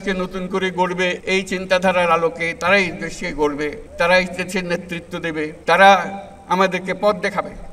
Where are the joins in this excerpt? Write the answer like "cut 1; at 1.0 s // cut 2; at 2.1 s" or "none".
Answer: cut 1; at 1.2 s // cut 2; at 3.8 s